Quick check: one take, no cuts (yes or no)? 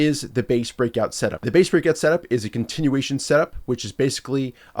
no